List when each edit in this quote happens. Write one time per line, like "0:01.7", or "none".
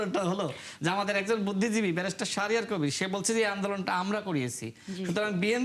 none